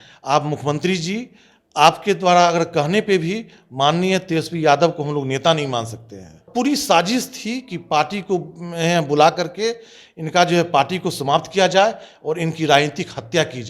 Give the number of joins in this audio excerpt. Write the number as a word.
one